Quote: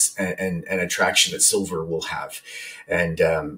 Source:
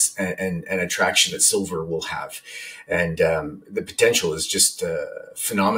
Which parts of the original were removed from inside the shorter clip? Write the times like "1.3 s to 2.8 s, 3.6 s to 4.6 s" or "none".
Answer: none